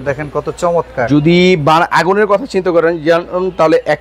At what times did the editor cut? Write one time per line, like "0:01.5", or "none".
none